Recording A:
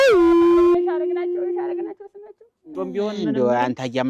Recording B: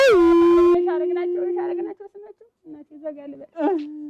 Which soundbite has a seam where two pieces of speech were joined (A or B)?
A